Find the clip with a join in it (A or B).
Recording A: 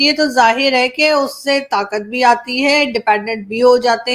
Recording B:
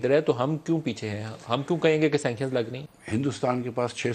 B